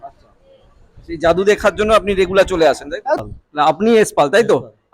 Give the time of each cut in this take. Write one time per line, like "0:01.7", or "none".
0:03.2